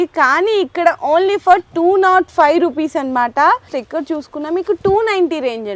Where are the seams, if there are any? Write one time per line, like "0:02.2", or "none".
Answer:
0:03.8